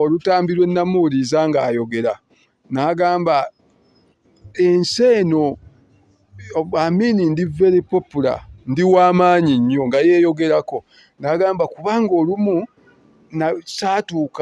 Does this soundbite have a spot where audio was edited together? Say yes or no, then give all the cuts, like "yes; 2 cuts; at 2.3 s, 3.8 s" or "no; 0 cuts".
no; 0 cuts